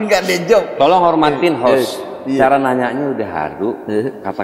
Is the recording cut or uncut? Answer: uncut